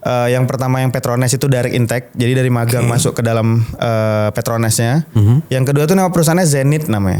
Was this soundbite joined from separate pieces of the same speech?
no; 0 cuts

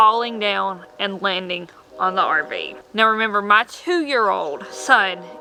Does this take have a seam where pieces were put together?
no; 0 cuts

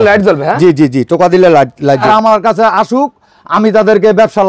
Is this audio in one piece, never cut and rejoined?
no; 1 cut; at 2.0 s

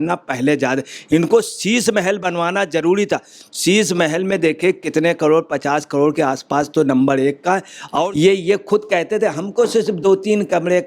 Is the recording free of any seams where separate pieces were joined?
no; 1 cut; at 8.1 s

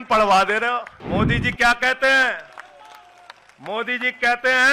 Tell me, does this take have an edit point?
yes; 1 cut; at 1.0 s

